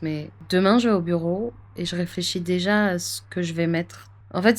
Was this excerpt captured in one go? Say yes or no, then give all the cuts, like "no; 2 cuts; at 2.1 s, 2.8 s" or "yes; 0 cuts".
yes; 0 cuts